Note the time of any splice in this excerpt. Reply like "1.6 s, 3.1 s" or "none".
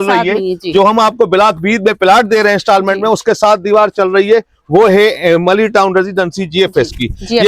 none